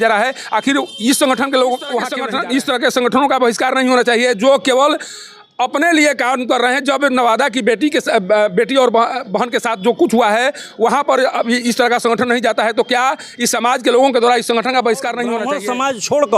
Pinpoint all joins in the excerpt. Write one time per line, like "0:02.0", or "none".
0:02.2
0:15.5